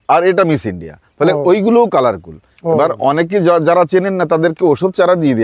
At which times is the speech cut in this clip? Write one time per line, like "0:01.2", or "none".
none